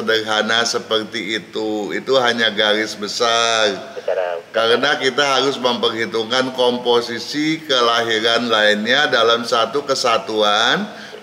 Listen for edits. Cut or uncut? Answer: uncut